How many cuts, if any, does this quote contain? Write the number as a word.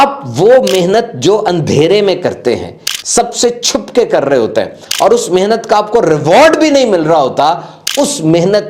zero